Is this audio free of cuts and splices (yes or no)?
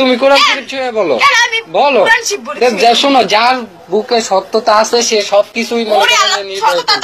yes